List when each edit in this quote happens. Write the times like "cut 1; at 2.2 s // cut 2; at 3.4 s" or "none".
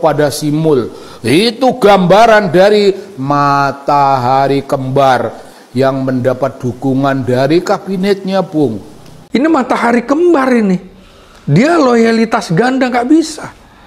cut 1; at 9.1 s